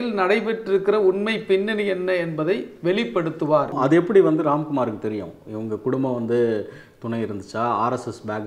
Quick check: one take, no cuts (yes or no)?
no